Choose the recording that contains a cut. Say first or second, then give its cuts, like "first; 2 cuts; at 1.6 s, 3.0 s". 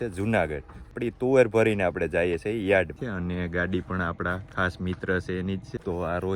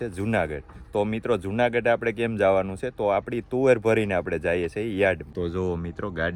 first; 2 cuts; at 0.9 s, 3.0 s